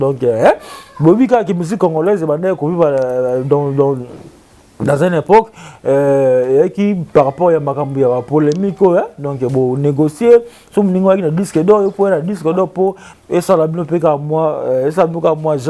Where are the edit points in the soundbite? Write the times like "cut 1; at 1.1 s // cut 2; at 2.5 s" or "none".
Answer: none